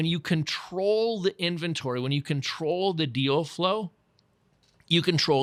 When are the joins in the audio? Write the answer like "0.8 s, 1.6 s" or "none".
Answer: none